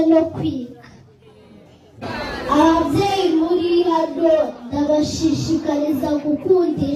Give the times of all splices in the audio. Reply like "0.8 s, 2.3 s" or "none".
none